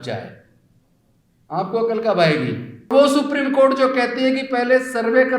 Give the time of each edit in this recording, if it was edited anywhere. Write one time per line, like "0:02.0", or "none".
0:02.9